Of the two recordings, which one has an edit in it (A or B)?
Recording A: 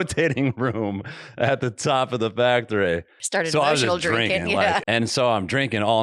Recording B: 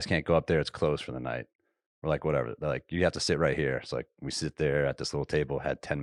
A